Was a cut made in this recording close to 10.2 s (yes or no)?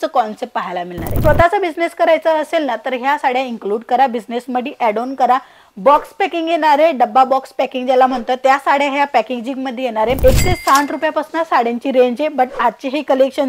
yes